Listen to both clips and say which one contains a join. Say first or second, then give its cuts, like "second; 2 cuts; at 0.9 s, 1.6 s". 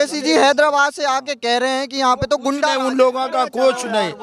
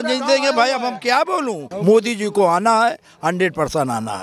second; 1 cut; at 1.7 s